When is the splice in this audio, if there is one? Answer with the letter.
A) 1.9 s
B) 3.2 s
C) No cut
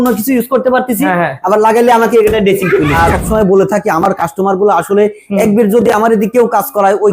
B